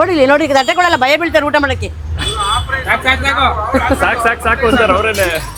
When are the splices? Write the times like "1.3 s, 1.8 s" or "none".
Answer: none